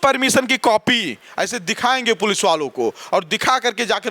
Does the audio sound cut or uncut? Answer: uncut